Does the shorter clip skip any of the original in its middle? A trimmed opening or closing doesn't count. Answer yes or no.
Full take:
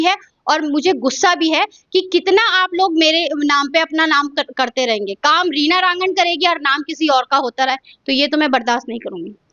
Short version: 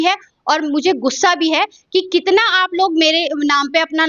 no